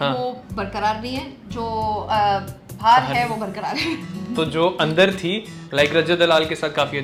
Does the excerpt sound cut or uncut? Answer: uncut